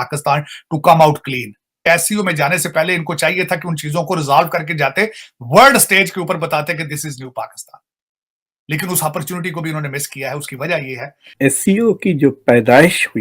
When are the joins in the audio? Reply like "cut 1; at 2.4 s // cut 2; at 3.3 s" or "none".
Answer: cut 1; at 11.3 s